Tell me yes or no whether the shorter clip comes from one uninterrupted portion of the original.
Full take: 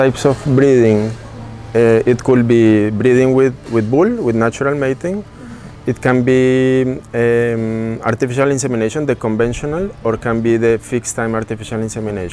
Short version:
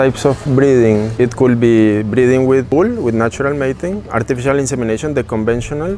no